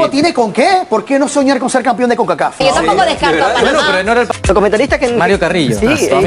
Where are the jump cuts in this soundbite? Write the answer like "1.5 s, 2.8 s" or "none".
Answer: 2.6 s, 4.3 s

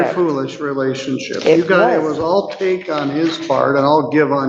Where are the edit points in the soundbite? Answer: none

